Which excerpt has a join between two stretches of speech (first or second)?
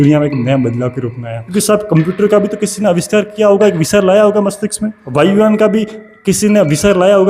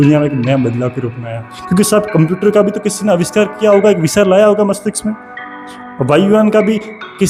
first